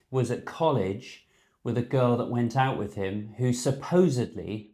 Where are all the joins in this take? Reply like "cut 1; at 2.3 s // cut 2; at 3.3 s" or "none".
none